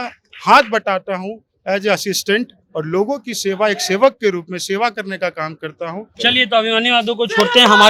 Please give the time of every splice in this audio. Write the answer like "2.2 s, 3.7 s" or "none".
none